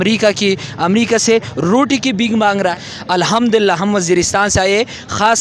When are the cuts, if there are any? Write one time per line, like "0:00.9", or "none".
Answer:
0:02.7